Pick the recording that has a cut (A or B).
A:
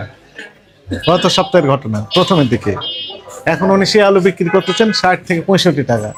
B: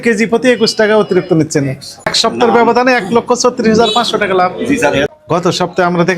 B